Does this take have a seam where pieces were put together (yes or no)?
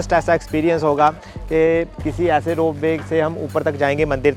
no